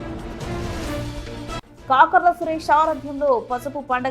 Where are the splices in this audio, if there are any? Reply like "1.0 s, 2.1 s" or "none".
1.1 s